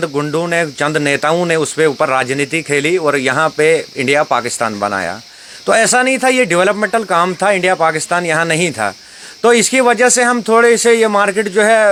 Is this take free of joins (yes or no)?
yes